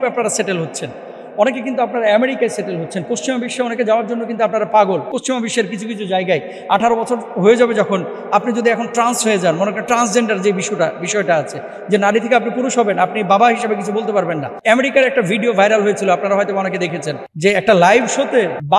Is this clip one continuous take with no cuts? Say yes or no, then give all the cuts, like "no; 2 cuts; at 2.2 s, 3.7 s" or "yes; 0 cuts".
no; 2 cuts; at 5.2 s, 14.6 s